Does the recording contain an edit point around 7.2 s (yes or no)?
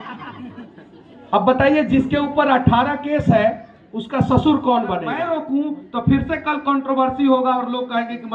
no